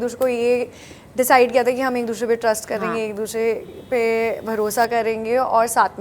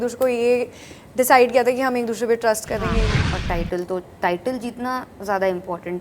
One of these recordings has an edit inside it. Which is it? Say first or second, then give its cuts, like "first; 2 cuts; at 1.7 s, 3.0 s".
second; 1 cut; at 3.1 s